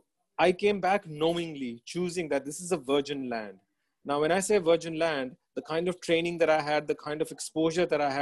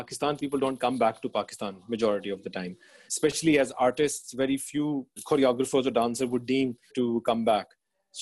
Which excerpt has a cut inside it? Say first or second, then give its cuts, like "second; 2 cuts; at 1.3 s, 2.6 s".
second; 3 cuts; at 3.1 s, 5.1 s, 6.9 s